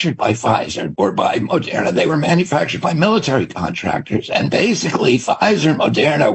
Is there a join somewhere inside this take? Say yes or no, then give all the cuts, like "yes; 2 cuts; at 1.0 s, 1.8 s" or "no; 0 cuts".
no; 0 cuts